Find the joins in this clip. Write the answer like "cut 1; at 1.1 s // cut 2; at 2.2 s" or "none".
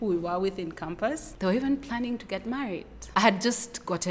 cut 1; at 1.3 s // cut 2; at 3.0 s